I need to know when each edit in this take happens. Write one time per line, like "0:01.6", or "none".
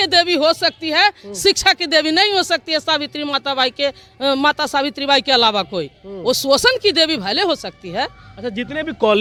none